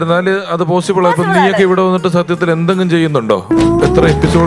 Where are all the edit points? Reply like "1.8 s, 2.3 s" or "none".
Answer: none